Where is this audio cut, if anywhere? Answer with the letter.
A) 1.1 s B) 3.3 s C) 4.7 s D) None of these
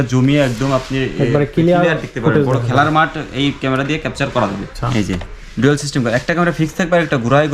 C